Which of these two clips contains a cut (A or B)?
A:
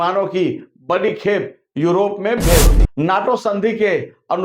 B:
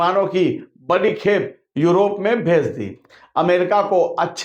A